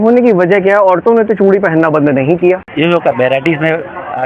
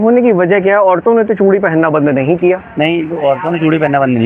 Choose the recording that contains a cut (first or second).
first